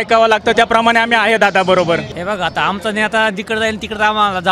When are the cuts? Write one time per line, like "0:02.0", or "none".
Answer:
0:02.1